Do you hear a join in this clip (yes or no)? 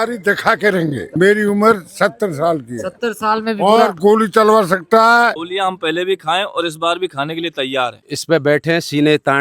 yes